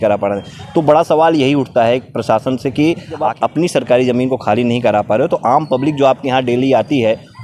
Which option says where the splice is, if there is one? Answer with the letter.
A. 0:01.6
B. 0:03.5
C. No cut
B